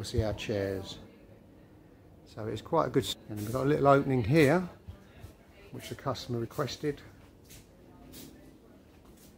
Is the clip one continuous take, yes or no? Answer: no